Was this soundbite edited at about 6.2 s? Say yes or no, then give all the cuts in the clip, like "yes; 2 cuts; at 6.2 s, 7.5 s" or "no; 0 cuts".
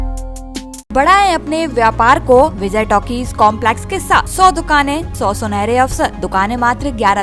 yes; 5 cuts; at 0.9 s, 2.6 s, 4.3 s, 5.1 s, 6.2 s